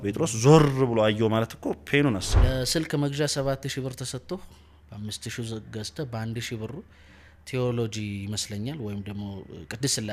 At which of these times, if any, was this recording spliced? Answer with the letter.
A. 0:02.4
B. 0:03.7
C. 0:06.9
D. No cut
A